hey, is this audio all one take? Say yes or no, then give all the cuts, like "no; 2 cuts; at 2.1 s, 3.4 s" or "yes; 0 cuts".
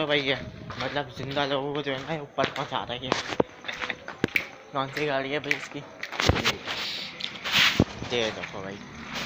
yes; 0 cuts